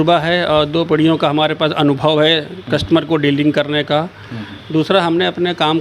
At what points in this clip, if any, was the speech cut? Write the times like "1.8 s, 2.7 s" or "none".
none